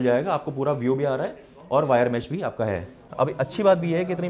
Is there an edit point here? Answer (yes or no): yes